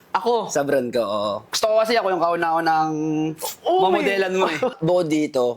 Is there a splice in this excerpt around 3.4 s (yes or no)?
no